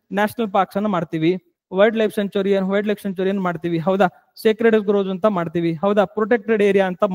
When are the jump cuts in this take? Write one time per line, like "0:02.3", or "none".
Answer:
none